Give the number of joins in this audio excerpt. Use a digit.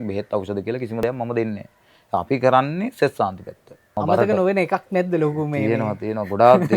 1